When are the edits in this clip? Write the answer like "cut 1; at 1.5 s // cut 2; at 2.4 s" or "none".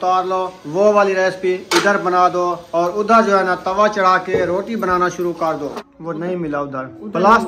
cut 1; at 5.7 s

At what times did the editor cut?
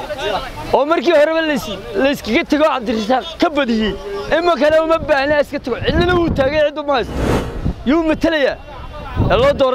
none

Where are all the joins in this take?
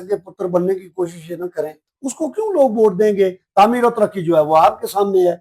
cut 1; at 1.7 s

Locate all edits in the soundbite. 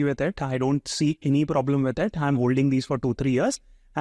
none

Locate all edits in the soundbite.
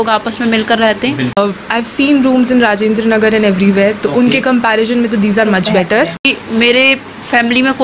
cut 1; at 1.4 s // cut 2; at 6.3 s

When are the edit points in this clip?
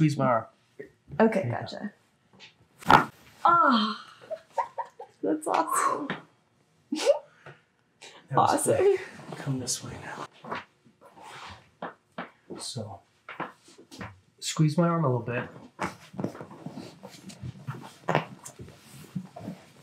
none

